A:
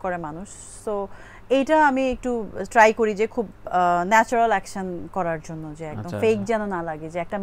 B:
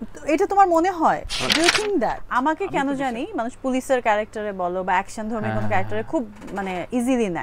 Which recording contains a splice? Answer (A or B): B